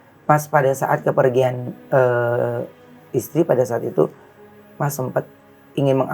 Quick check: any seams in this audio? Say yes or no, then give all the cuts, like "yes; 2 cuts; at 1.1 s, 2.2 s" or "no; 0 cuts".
no; 0 cuts